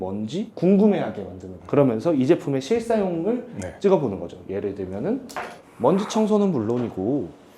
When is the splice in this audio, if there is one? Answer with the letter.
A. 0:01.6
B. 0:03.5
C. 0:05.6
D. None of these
C